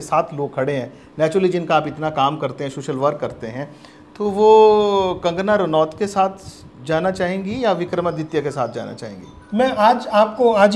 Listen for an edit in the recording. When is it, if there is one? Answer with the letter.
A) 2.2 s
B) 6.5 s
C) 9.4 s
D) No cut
D